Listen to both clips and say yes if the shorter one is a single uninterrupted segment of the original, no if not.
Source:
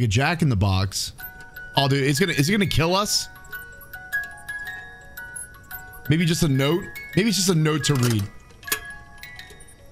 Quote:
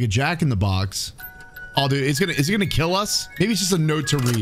no